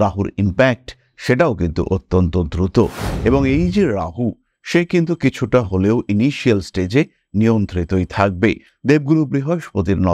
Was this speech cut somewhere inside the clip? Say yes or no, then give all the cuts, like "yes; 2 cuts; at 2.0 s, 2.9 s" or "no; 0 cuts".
yes; 1 cut; at 3.0 s